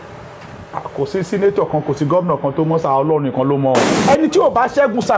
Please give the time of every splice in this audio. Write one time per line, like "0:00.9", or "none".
0:03.9